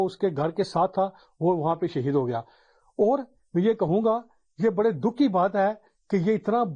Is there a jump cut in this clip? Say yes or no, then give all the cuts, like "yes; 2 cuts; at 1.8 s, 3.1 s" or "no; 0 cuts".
no; 0 cuts